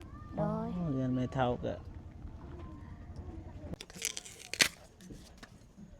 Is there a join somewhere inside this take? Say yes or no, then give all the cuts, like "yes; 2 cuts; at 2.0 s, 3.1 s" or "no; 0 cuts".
yes; 1 cut; at 3.8 s